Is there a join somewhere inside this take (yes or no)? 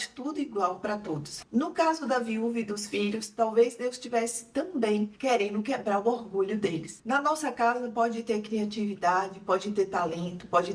yes